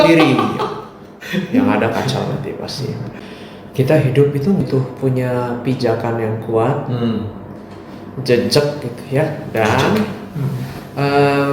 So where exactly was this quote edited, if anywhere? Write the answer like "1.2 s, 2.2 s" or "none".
3.1 s, 4.6 s